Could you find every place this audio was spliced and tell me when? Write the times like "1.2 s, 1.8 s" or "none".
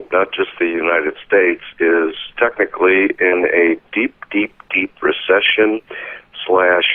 none

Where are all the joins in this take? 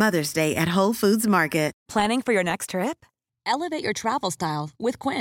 1.8 s

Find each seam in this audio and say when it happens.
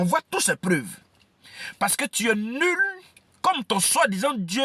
none

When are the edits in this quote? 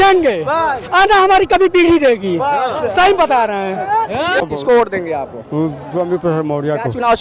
4.4 s

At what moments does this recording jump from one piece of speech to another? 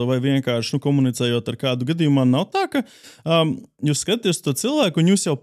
none

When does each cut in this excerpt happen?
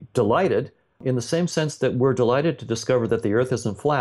1.0 s

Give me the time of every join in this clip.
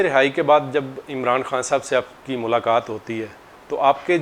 none

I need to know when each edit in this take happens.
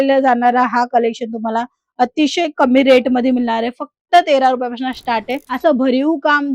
5.5 s

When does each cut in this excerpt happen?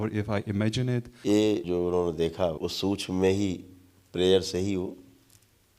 1.1 s, 1.6 s, 2.6 s

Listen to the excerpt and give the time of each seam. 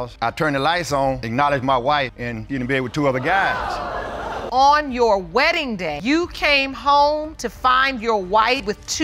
none

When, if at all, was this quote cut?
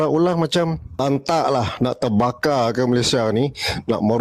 1.0 s

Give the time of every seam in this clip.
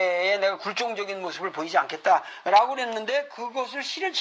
2.3 s

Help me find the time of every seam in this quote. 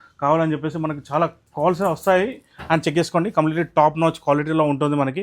none

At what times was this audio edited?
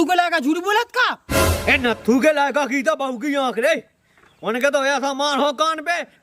none

